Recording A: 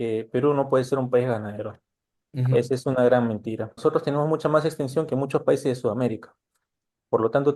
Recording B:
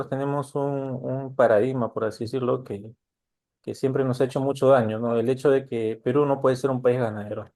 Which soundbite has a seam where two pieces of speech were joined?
A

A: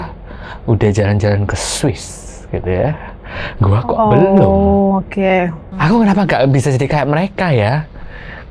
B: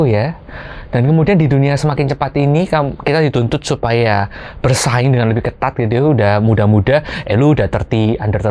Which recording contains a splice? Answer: A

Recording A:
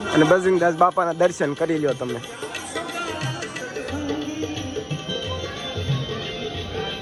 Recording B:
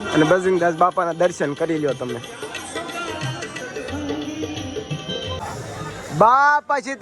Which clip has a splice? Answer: B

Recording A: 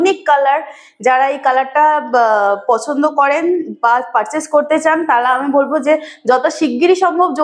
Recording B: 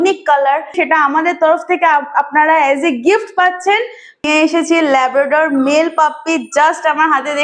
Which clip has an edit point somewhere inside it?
B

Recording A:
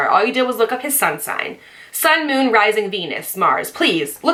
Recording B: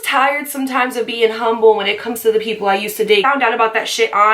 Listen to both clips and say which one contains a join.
B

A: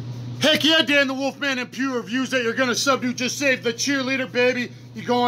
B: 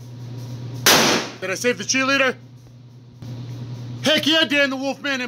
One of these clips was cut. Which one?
B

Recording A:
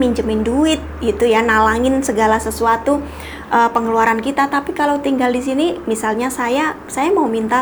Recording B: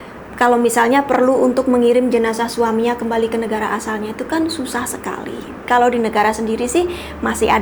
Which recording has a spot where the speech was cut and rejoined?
B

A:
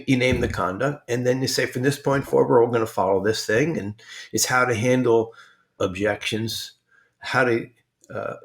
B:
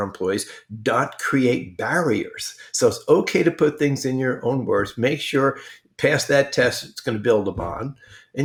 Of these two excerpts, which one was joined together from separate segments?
A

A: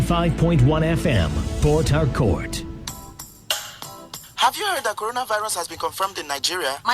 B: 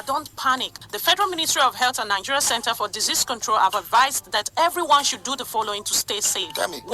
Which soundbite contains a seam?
A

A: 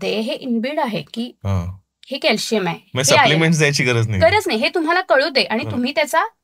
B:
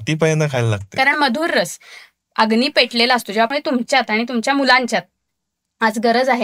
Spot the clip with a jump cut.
B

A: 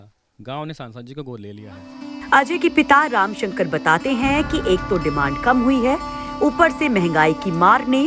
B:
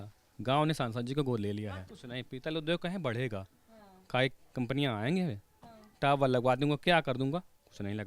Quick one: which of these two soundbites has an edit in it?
B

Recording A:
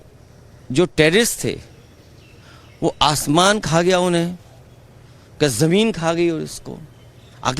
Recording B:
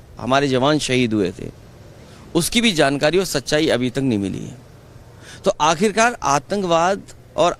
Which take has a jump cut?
A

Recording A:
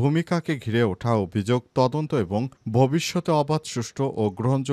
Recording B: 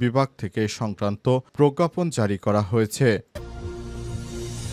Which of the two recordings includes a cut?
B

